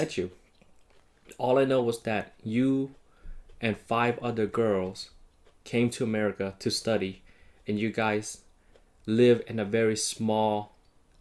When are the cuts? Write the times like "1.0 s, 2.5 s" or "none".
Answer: none

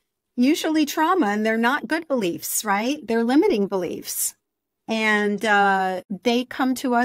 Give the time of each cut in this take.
6.1 s

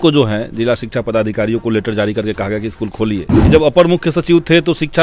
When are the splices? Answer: 3.3 s

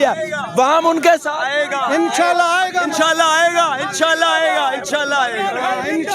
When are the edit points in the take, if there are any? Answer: none

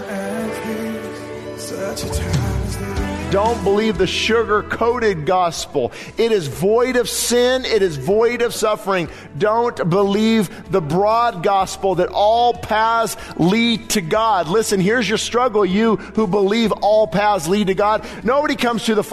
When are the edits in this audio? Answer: 3.2 s, 8.6 s, 18.1 s

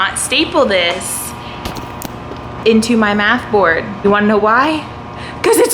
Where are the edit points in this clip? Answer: 3.9 s

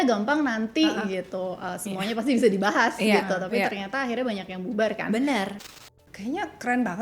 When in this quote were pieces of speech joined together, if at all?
5.5 s

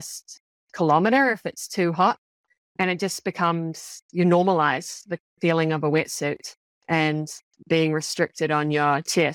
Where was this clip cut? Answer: none

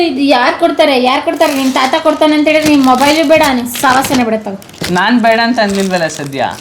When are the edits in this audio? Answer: none

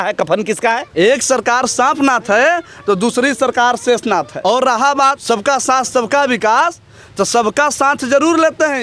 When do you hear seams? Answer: 0.9 s, 4.3 s, 5.2 s

